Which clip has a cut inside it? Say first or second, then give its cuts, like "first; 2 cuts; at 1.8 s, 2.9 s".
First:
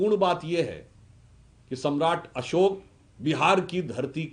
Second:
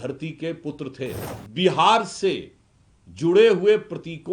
second; 1 cut; at 1.3 s